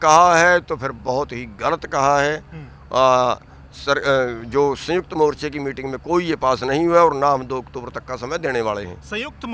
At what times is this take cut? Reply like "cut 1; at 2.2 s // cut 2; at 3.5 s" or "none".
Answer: none